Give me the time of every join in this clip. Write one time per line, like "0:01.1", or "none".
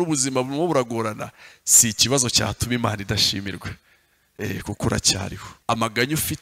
0:05.5